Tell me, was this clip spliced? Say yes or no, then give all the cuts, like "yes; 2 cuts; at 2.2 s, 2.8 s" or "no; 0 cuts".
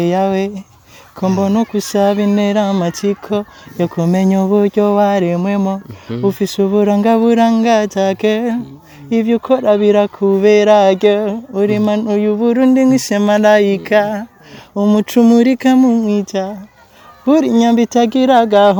no; 0 cuts